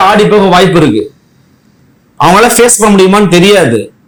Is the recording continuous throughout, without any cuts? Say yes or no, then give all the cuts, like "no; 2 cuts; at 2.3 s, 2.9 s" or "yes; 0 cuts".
yes; 0 cuts